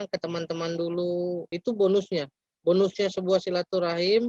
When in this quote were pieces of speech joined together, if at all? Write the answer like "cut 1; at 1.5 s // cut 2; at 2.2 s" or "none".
cut 1; at 1.5 s